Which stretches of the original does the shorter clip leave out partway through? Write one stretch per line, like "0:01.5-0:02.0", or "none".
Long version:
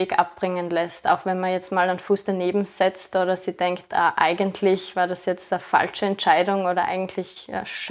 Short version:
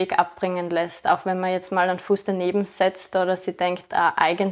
none